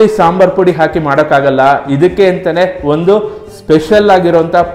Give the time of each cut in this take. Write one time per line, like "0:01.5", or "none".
none